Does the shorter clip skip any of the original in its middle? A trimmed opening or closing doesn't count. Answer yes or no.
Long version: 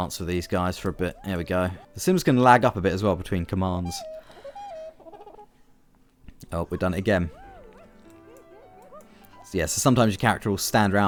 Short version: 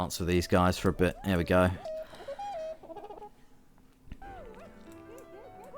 yes